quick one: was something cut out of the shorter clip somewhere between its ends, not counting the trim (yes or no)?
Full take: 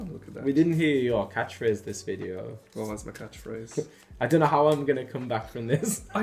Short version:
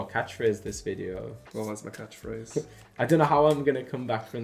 no